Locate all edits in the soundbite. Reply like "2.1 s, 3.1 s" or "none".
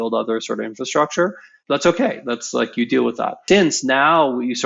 1.5 s, 3.4 s

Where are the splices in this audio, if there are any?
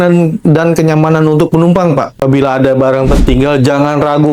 2.2 s

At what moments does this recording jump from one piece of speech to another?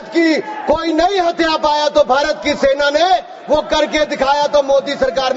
none

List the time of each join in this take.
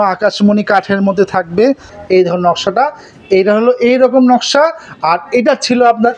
1.9 s

